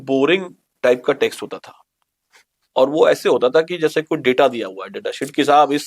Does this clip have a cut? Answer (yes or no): no